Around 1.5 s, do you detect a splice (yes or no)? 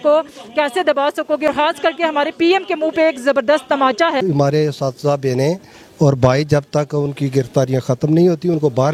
yes